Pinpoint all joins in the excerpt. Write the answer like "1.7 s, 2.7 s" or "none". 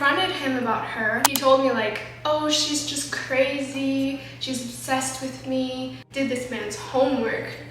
1.3 s, 6.0 s